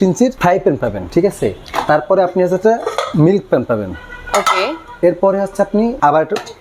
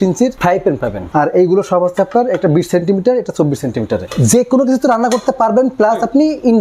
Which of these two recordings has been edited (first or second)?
second